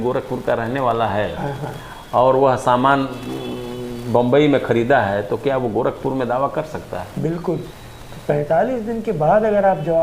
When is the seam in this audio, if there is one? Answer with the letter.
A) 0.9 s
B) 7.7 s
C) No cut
B